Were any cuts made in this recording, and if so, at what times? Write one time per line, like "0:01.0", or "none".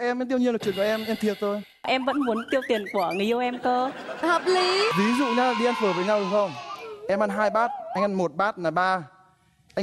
0:01.8
0:04.9